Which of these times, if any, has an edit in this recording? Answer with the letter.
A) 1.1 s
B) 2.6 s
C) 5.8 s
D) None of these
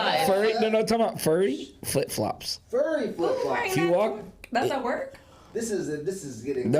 D